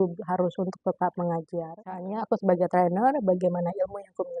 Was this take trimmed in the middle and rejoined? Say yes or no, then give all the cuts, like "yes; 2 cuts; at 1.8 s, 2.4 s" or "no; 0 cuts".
yes; 1 cut; at 2.0 s